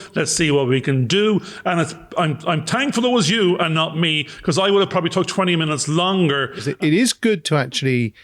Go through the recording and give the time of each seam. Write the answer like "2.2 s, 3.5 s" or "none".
6.7 s